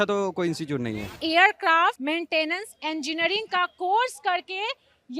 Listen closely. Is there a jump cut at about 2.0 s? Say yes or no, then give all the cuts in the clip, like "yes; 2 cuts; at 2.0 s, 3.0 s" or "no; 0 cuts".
yes; 2 cuts; at 1.2 s, 2.0 s